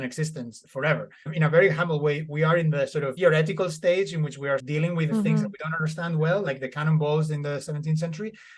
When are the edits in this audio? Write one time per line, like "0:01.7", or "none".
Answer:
0:01.3
0:04.6